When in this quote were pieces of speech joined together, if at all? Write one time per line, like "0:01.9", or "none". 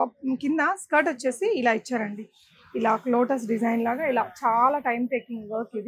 none